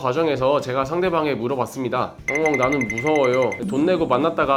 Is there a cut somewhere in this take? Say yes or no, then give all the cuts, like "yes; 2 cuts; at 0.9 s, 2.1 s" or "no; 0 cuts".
no; 0 cuts